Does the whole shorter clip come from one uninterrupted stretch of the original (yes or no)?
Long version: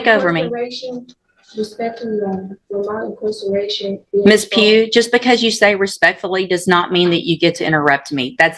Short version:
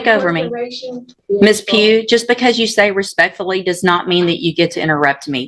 no